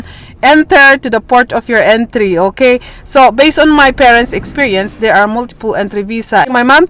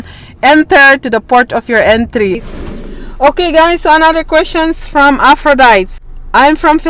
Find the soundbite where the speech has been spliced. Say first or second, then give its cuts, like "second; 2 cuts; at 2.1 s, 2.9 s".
second; 2 cuts; at 2.4 s, 5.9 s